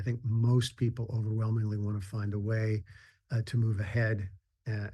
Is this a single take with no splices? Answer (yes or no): yes